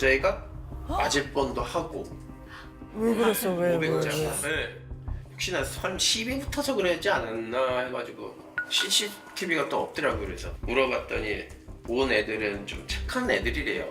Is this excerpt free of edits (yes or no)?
yes